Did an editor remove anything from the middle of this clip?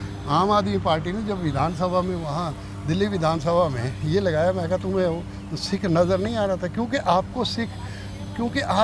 no; 0 cuts

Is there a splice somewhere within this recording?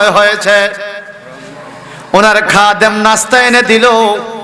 no; 0 cuts

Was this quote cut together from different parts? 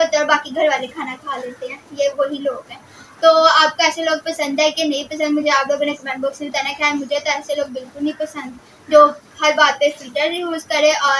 no; 0 cuts

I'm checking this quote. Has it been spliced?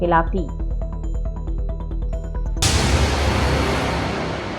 yes; 1 cut; at 2.5 s

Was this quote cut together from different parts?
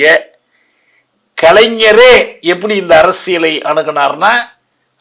no; 0 cuts

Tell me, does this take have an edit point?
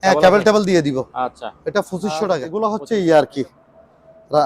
yes; 1 cut; at 2.5 s

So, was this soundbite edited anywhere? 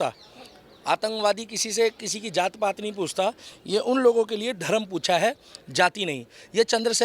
no; 0 cuts

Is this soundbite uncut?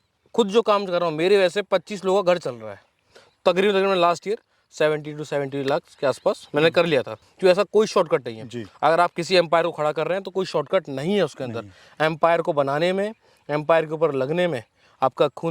no; 2 cuts; at 3.0 s, 7.2 s

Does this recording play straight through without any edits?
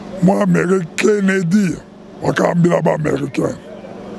yes; 0 cuts

